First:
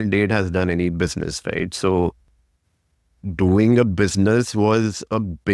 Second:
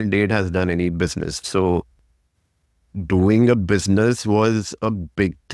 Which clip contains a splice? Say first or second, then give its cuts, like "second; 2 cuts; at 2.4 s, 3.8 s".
second; 1 cut; at 1.4 s